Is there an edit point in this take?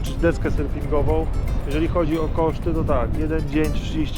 no; 0 cuts

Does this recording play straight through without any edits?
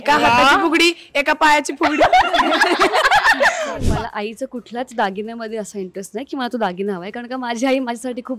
no; 1 cut; at 3.8 s

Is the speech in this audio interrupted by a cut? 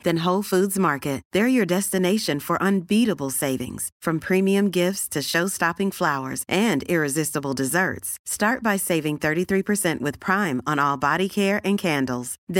no; 0 cuts

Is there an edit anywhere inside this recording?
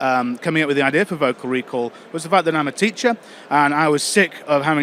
no; 0 cuts

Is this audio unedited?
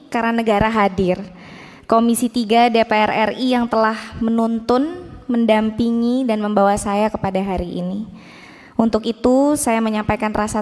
yes; 0 cuts

